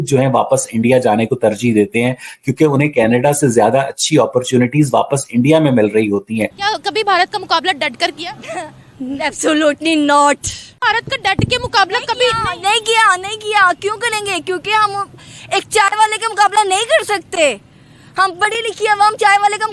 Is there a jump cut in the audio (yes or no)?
yes